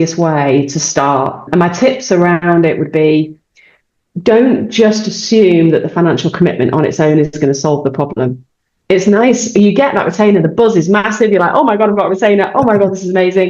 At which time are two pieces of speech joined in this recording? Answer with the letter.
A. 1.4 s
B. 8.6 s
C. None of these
A